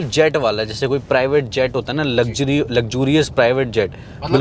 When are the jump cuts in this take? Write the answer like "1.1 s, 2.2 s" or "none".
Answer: none